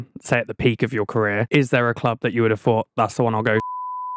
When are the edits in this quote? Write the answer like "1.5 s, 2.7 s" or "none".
1.4 s